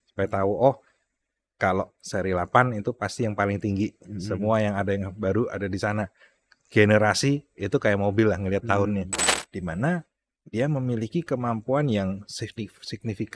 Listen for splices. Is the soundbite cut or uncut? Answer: cut